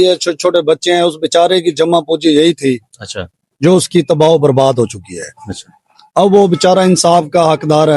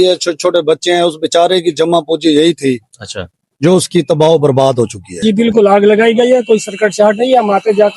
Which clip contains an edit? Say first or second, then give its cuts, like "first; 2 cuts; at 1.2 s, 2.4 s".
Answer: second; 1 cut; at 5.1 s